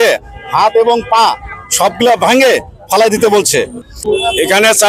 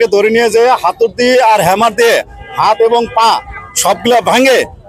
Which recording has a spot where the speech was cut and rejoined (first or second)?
first